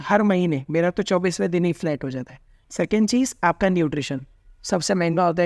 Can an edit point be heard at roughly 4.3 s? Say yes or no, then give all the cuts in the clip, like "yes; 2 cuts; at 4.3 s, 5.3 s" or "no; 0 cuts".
no; 1 cut; at 2.6 s